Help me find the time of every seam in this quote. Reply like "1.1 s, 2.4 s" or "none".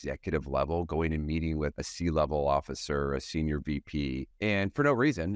1.7 s, 4.3 s